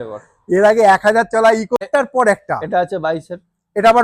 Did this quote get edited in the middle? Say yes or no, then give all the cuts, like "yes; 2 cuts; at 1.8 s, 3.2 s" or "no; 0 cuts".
yes; 1 cut; at 1.8 s